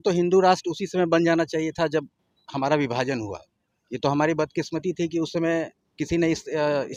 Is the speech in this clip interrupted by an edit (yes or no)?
no